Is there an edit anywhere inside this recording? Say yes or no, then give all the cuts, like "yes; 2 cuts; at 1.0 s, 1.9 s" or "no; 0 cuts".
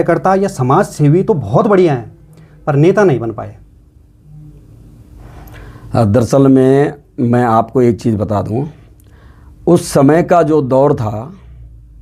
no; 0 cuts